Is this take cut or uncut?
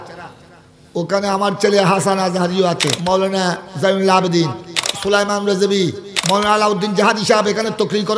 cut